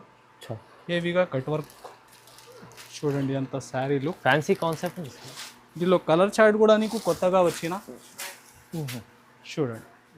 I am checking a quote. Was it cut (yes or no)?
no